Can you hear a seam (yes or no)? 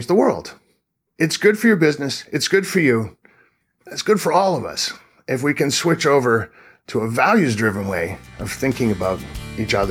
yes